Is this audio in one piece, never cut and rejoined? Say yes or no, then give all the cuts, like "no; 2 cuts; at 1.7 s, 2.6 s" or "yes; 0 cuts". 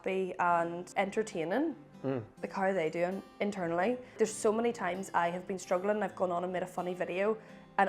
no; 3 cuts; at 0.8 s, 2.4 s, 4.2 s